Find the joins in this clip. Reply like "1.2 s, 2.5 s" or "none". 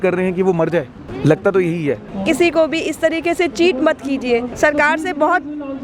1.0 s, 2.1 s, 4.5 s